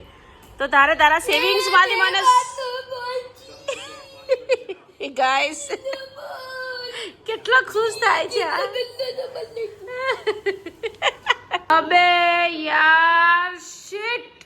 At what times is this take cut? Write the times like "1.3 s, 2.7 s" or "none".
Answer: 11.7 s